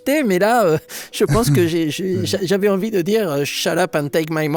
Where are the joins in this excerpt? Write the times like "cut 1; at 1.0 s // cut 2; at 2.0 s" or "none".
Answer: none